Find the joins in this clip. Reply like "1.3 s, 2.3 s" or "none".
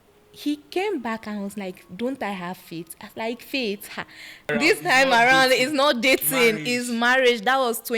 4.5 s